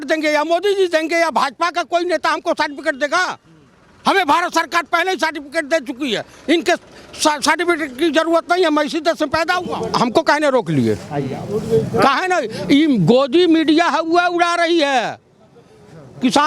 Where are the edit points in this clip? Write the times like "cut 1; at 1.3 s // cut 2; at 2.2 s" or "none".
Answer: cut 1; at 9.8 s